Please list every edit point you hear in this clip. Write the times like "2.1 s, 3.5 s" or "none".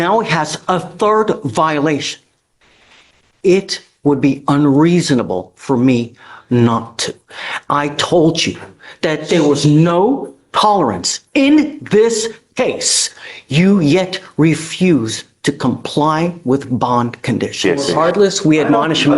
17.6 s